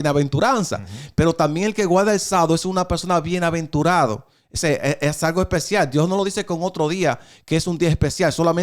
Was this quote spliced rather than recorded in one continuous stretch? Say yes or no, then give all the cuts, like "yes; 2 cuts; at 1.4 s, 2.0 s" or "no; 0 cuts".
no; 0 cuts